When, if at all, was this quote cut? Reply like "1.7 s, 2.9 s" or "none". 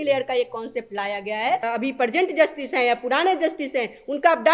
1.7 s